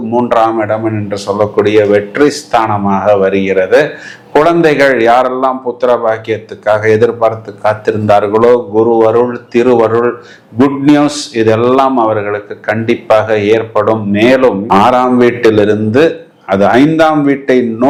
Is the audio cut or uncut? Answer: uncut